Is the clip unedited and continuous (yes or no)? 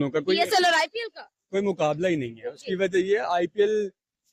yes